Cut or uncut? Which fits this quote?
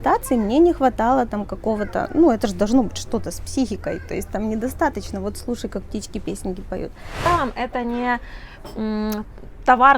cut